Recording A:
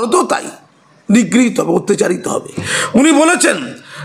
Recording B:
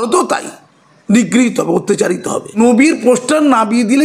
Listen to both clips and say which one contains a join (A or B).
A